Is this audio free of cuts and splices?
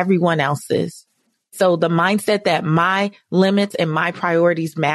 no; 1 cut; at 1.5 s

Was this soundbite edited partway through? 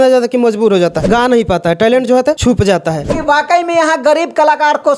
yes; 2 cuts; at 1.0 s, 2.7 s

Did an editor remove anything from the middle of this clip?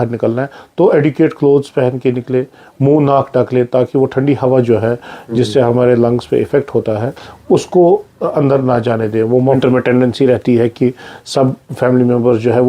yes; 1 cut; at 9.6 s

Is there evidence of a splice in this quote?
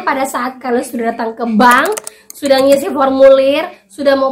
no; 0 cuts

